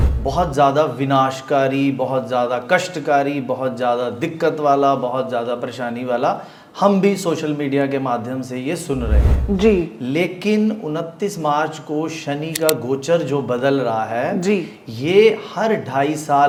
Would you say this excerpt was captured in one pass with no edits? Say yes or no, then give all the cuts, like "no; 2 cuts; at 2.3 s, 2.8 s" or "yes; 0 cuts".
yes; 0 cuts